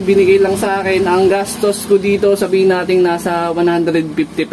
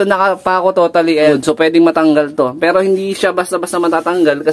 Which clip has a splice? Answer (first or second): second